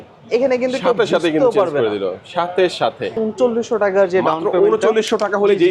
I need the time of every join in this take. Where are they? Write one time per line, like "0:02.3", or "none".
0:03.2